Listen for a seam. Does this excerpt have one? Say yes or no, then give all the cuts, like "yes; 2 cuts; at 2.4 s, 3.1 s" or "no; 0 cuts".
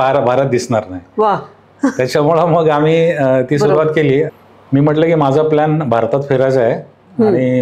yes; 1 cut; at 4.3 s